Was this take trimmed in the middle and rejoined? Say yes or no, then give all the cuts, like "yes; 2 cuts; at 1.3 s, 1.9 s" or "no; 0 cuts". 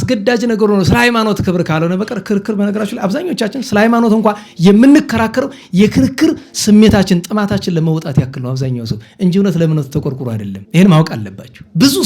yes; 1 cut; at 10.5 s